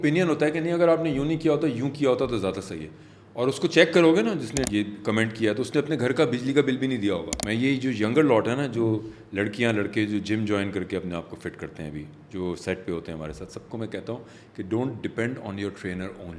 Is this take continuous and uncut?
no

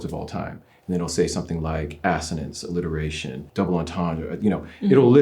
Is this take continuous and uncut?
yes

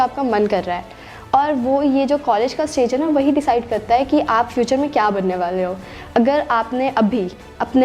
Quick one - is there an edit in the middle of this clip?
no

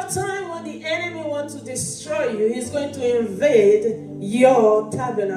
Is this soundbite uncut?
yes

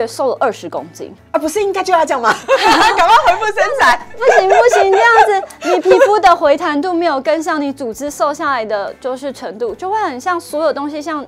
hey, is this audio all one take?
yes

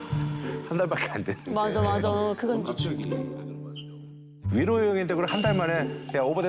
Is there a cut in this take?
no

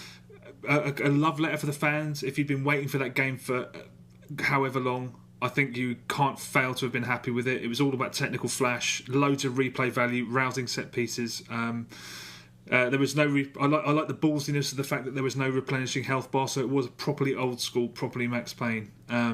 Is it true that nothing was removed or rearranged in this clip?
no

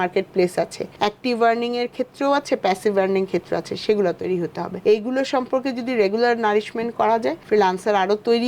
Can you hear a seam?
yes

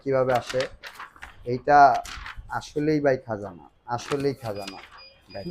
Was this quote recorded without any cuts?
yes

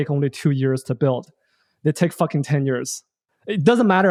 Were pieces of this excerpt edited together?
no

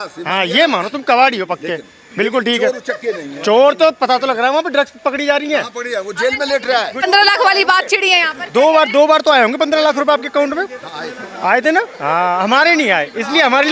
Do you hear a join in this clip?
yes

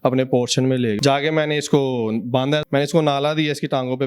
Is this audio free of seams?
no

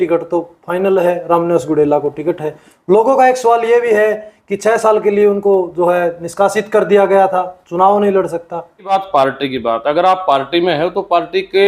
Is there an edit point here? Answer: yes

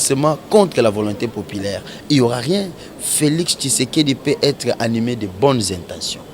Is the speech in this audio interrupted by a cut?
yes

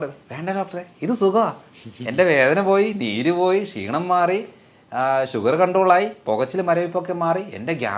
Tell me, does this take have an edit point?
no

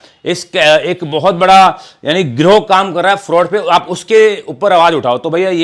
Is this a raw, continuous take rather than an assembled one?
yes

